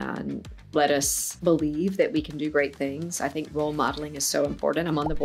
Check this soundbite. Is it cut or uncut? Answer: uncut